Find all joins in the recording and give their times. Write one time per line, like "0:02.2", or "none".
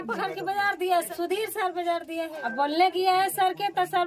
0:01.1
0:02.4